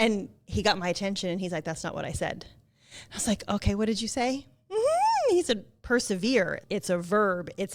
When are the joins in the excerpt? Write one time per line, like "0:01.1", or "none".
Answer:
none